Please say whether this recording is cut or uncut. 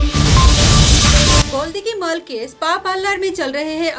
cut